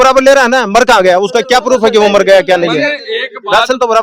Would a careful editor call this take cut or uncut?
uncut